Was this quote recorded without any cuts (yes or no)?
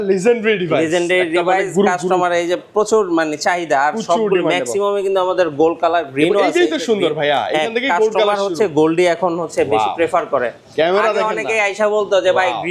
yes